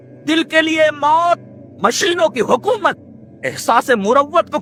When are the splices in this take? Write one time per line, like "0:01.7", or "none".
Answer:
none